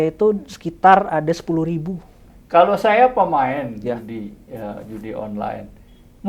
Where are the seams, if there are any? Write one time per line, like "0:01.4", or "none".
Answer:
0:02.3